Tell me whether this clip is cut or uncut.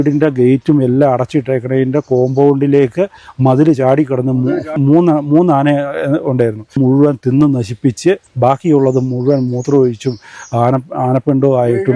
cut